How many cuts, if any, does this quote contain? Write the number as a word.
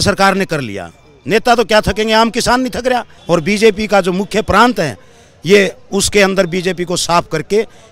one